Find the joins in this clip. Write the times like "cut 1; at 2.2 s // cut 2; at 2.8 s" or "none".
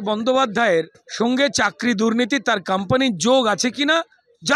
cut 1; at 1.0 s